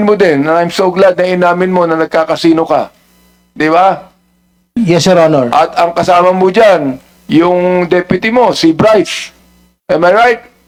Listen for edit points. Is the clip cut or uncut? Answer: uncut